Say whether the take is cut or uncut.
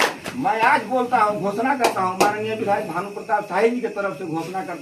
uncut